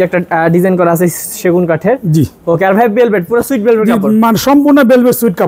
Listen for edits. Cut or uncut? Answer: uncut